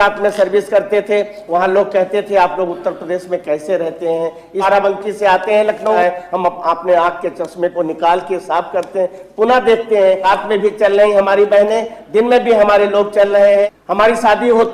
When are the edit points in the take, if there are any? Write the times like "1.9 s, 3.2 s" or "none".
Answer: 4.6 s, 6.0 s, 10.2 s, 13.8 s